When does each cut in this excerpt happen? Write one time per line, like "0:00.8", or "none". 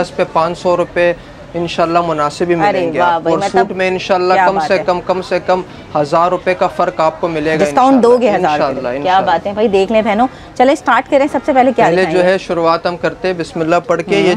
none